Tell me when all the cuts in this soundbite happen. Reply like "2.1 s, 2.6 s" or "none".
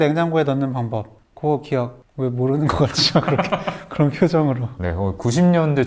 1.2 s